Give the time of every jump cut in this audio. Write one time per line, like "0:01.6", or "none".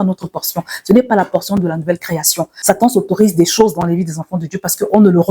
0:02.5